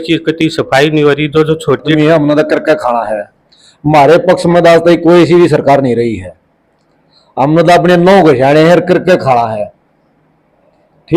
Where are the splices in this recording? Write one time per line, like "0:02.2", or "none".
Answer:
0:02.0